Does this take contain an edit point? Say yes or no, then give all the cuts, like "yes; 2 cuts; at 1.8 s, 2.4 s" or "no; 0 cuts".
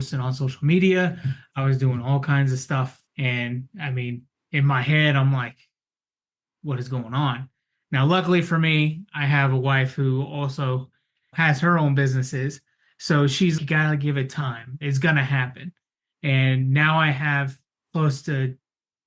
no; 0 cuts